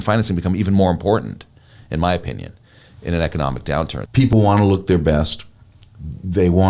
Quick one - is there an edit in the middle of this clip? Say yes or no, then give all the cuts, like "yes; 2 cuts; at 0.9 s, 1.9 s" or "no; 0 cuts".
yes; 1 cut; at 4.2 s